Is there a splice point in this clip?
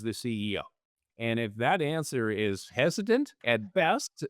yes; 1 cut; at 3.4 s

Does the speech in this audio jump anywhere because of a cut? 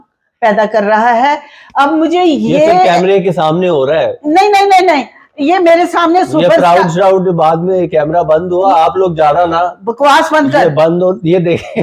no; 0 cuts

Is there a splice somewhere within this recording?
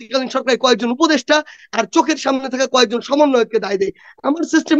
no; 0 cuts

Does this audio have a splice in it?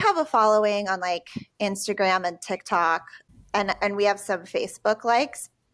yes; 1 cut; at 3.1 s

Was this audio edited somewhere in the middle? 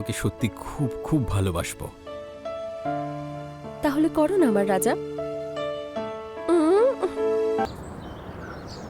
yes; 1 cut; at 7.7 s

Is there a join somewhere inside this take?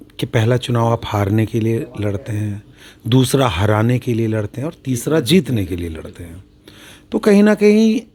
no; 0 cuts

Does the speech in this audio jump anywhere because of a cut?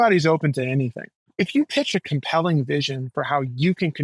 yes; 1 cut; at 1.3 s

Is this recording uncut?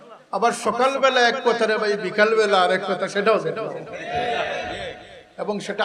yes; 0 cuts

